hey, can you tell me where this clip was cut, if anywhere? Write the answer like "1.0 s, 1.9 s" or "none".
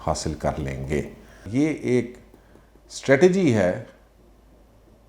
1.4 s

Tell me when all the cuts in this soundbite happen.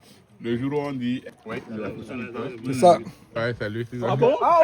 1.2 s, 3.2 s

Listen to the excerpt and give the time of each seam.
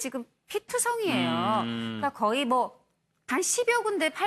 1.0 s

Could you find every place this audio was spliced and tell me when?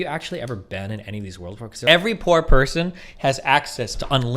1.8 s

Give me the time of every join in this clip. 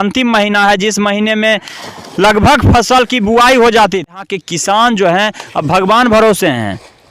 4.2 s

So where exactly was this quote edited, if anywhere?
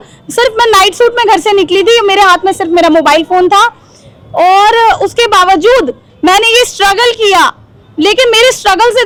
none

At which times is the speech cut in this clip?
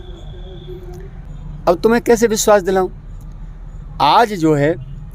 1.3 s

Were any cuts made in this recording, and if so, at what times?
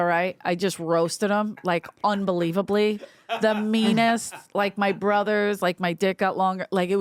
none

